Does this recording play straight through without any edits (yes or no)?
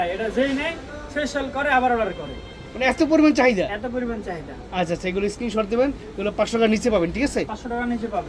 yes